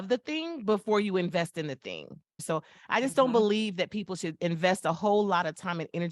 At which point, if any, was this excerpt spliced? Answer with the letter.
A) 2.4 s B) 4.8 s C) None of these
A